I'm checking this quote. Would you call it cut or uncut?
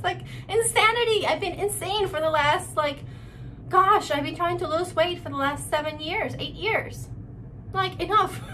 uncut